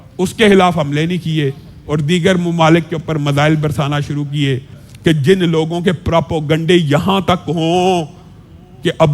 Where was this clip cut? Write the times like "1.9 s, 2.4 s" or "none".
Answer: 4.8 s